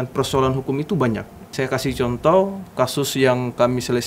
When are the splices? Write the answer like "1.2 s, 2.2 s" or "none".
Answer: 1.4 s